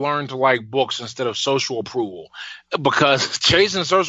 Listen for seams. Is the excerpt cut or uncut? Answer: cut